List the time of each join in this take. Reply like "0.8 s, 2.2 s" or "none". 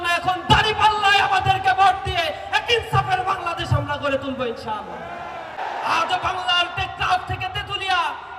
5.6 s